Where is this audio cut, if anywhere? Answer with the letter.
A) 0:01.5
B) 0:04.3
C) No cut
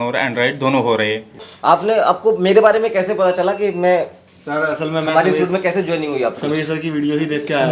A